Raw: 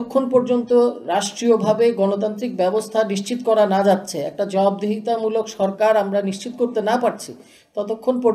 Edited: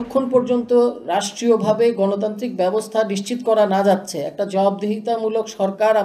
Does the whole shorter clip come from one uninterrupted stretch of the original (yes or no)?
yes